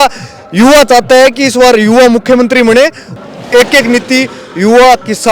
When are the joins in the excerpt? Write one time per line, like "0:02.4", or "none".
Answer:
0:03.0